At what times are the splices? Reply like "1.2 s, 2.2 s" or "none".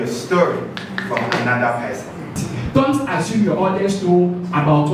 2.5 s